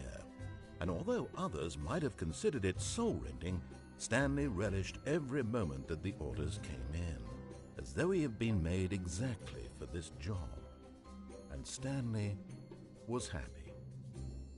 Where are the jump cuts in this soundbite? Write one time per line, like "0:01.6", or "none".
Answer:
0:13.5